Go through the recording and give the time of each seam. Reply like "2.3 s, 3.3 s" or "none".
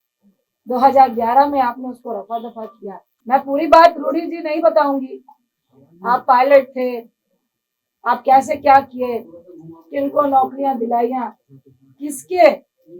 3.1 s